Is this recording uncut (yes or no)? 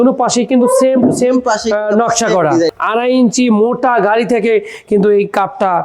no